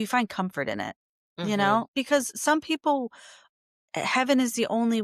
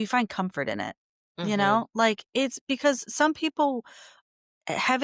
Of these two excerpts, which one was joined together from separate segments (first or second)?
first